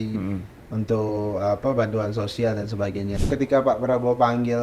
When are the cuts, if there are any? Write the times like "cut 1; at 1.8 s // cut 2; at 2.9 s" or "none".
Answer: cut 1; at 3.2 s